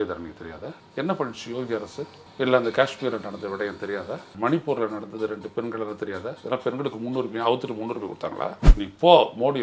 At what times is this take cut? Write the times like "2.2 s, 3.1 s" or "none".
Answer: 8.6 s